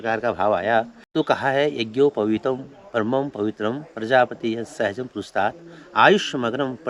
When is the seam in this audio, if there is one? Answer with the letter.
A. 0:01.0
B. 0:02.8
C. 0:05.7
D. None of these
A